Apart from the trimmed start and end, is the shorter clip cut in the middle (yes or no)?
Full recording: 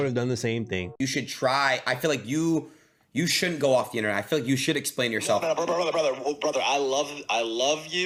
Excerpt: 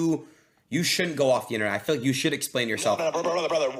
no